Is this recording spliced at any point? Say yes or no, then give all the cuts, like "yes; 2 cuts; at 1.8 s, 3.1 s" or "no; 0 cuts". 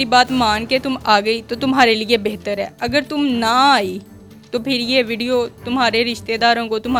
no; 0 cuts